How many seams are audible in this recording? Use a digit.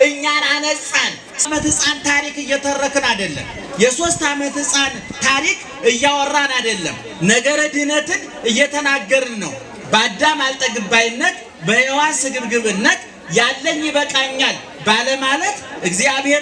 1